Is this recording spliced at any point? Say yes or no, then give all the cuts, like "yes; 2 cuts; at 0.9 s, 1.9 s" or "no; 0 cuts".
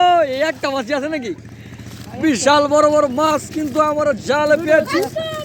no; 0 cuts